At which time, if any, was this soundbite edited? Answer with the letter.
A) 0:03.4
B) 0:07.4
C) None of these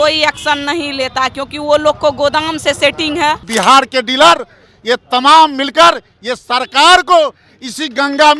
A